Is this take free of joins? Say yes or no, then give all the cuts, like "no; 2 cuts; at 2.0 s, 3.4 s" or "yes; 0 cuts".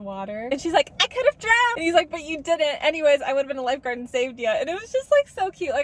yes; 0 cuts